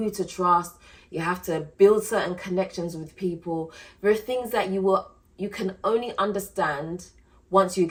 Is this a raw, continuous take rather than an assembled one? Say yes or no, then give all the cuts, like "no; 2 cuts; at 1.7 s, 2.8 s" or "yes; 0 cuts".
yes; 0 cuts